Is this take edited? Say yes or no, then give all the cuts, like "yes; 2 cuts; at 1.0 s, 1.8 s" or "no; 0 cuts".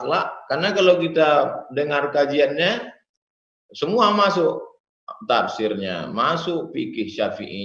no; 0 cuts